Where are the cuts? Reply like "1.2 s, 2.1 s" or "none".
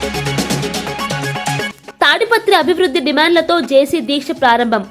1.7 s